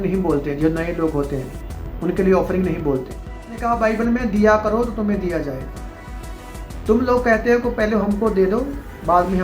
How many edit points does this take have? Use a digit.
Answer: 1